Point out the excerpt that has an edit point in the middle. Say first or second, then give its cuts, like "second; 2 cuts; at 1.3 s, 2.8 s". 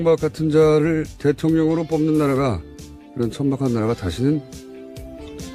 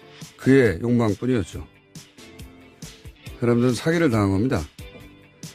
second; 1 cut; at 2.7 s